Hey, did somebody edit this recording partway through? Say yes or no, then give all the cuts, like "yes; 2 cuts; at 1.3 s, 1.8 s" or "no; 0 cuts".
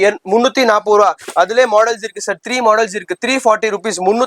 no; 0 cuts